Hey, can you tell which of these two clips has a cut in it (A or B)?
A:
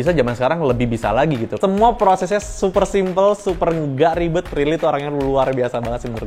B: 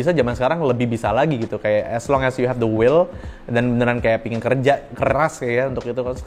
A